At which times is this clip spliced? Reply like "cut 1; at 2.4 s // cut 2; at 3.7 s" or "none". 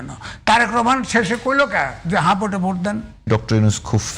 cut 1; at 3.1 s